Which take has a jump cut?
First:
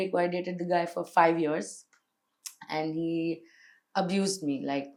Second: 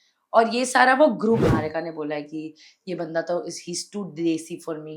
second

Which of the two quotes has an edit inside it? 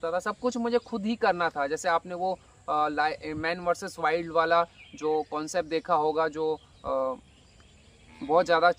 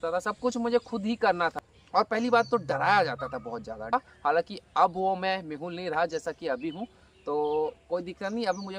second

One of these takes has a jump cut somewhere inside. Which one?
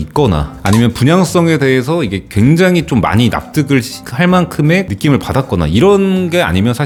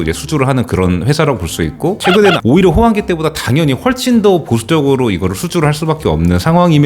second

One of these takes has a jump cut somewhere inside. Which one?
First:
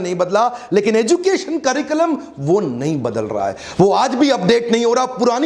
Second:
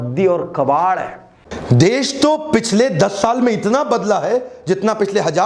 second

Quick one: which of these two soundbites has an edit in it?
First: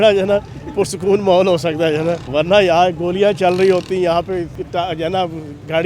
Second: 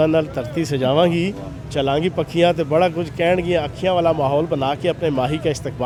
first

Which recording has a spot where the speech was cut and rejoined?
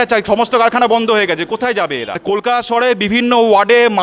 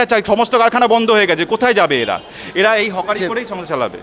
first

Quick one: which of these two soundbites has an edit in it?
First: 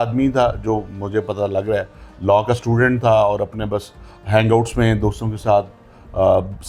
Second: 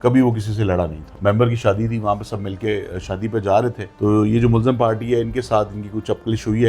second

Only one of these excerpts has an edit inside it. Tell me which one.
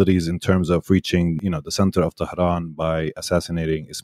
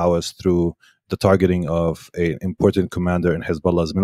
first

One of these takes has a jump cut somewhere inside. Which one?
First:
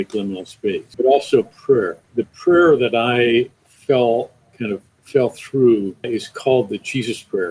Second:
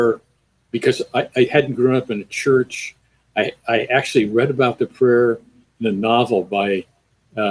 first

